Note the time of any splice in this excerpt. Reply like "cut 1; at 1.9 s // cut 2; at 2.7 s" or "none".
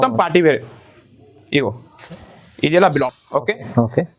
cut 1; at 3.1 s